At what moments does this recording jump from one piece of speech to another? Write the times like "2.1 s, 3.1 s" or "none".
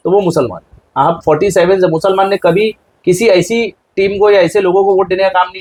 none